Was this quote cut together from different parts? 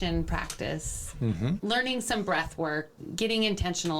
yes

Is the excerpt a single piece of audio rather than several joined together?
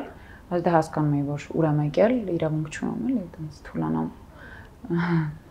yes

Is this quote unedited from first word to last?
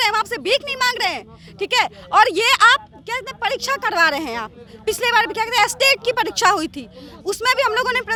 yes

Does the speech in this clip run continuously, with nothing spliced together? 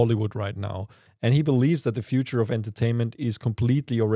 no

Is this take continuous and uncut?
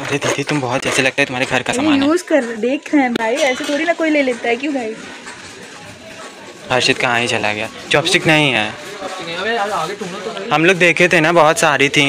yes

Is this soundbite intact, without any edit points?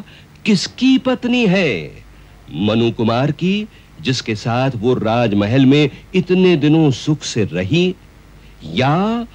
yes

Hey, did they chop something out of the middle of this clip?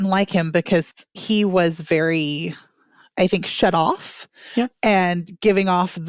yes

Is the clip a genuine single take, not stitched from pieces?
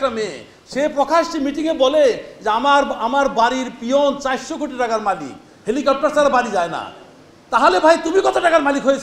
yes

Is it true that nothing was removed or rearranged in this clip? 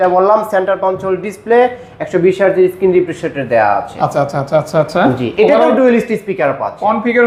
yes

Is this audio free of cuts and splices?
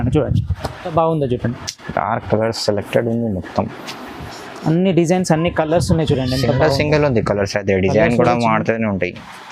no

